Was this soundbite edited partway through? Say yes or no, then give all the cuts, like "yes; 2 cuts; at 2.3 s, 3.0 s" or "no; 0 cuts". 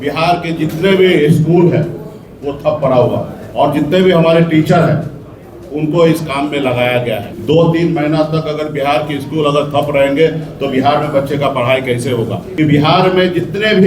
yes; 3 cuts; at 3.4 s, 7.3 s, 12.4 s